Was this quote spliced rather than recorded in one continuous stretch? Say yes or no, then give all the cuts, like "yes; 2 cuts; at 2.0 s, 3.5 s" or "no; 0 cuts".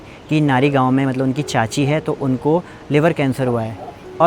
no; 0 cuts